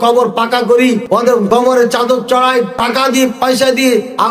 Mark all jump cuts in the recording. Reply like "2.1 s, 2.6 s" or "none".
1.2 s, 2.8 s